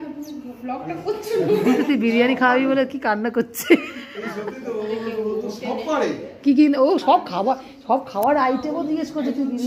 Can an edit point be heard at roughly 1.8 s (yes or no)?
yes